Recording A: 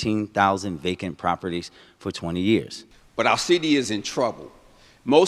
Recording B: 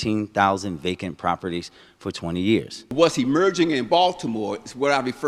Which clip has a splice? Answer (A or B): B